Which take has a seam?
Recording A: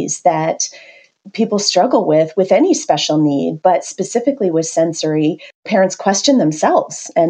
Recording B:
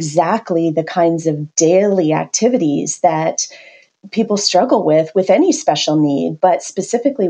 A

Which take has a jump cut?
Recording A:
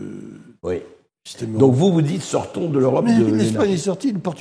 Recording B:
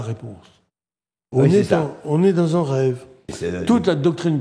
B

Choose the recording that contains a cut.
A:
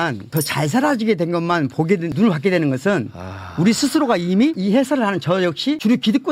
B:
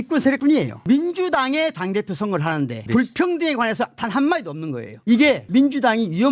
B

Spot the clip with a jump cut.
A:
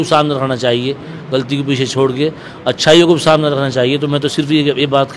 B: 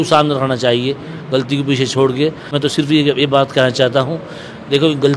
B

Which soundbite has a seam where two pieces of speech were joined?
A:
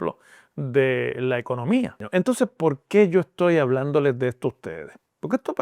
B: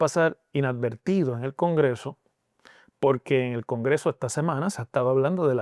A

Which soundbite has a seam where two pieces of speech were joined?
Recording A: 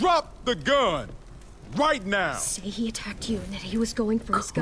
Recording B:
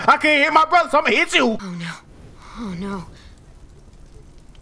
B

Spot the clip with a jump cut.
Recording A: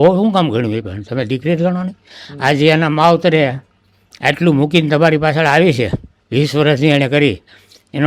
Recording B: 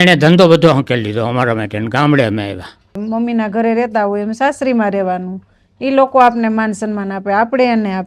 B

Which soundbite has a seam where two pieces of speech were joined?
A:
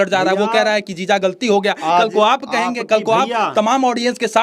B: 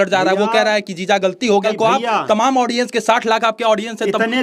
B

